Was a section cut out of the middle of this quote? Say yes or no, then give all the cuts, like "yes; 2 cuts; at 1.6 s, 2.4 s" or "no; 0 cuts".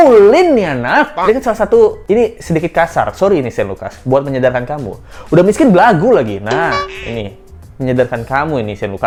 no; 0 cuts